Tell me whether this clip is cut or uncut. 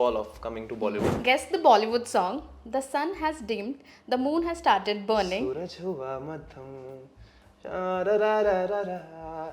cut